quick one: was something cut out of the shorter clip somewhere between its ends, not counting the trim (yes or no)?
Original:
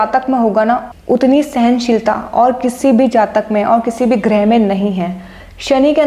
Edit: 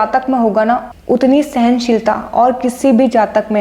no